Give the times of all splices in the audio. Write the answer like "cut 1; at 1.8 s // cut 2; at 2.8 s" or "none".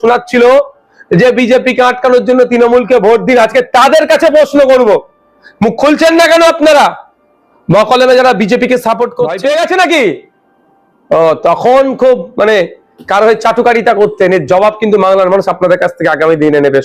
cut 1; at 9.3 s